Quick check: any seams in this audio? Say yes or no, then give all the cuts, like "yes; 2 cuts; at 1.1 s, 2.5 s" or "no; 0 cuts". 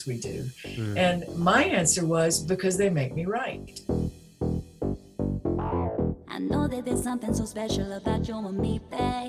yes; 1 cut; at 3.7 s